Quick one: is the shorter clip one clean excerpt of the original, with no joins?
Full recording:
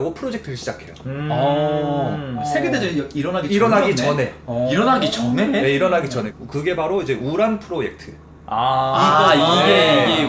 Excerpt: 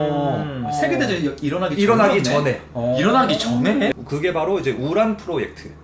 no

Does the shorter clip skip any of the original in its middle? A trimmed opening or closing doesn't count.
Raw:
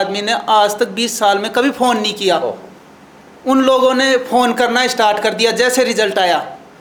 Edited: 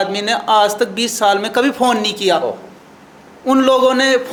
no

